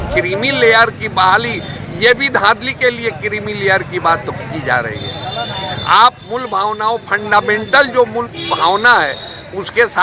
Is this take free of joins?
yes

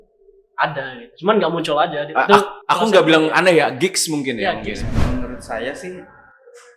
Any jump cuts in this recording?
yes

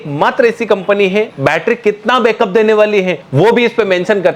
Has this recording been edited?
yes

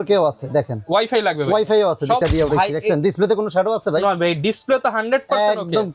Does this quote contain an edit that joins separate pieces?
yes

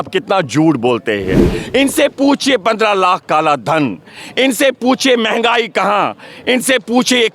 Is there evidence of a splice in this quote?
no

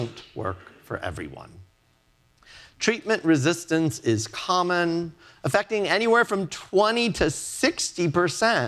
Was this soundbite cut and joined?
no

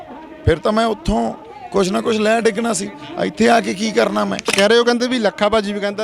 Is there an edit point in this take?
yes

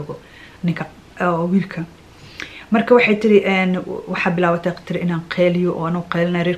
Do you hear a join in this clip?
no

